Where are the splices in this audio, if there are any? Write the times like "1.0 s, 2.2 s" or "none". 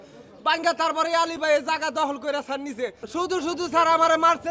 3.0 s